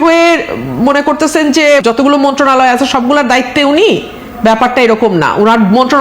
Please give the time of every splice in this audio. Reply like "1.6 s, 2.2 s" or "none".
1.8 s

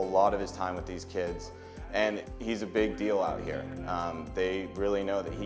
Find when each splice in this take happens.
none

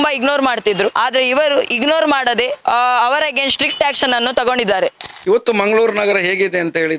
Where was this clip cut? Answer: 5.0 s

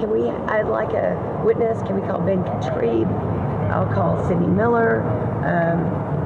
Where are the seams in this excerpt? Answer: none

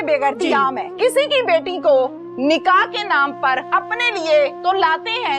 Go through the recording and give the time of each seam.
1.0 s, 3.7 s

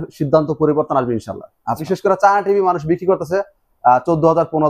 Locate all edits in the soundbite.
1.9 s

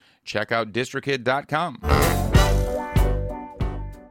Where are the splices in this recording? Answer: none

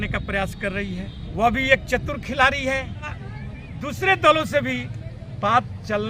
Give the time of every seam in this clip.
1.2 s, 3.2 s

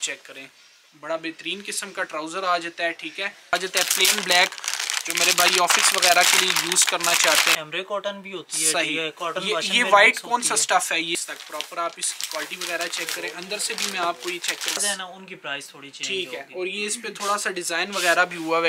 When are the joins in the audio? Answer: 3.5 s, 7.5 s, 11.1 s, 14.8 s

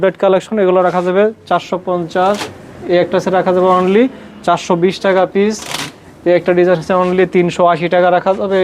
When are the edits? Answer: none

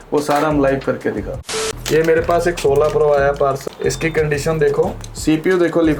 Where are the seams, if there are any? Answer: 1.6 s, 3.6 s, 4.9 s

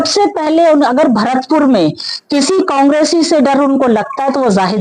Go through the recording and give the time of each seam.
none

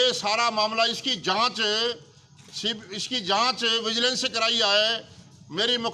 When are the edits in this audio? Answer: none

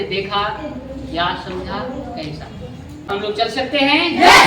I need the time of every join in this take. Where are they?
3.1 s

